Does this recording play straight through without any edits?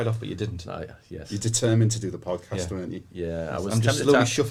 yes; 0 cuts

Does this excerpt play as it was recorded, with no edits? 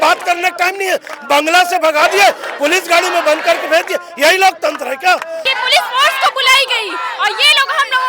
no; 1 cut; at 5.4 s

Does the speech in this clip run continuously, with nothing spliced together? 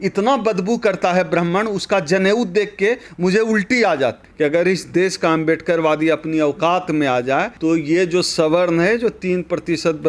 no; 2 cuts; at 4.2 s, 7.5 s

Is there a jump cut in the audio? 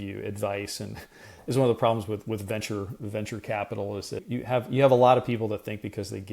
yes; 1 cut; at 4.2 s

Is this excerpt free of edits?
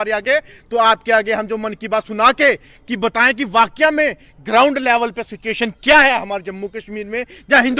yes; 0 cuts

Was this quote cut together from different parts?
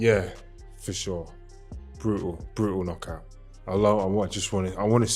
yes; 1 cut; at 3.2 s

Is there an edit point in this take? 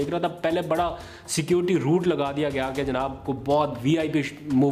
no; 0 cuts

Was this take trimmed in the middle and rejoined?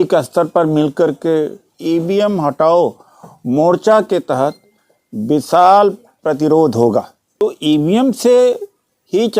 yes; 2 cuts; at 1.7 s, 7.2 s

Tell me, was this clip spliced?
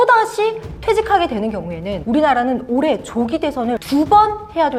no; 0 cuts

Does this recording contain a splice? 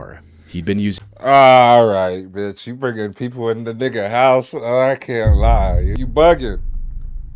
yes; 1 cut; at 5.9 s

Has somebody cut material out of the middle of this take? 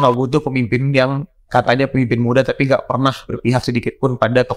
no; 0 cuts

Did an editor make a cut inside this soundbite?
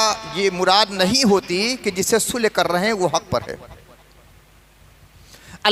no; 0 cuts

